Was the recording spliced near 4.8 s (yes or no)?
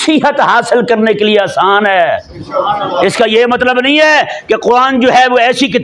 no